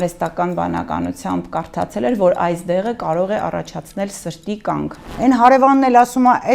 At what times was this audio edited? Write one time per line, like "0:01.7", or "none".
0:05.0